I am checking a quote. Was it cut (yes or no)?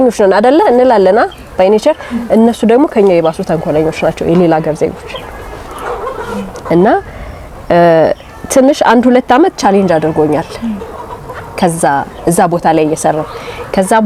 no